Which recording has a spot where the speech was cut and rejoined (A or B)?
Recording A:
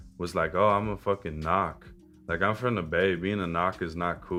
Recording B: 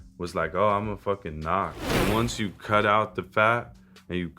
B